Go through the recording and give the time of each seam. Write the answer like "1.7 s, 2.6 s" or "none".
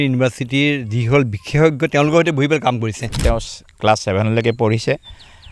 3.2 s